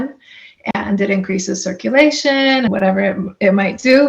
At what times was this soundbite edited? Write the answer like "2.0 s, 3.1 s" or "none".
2.7 s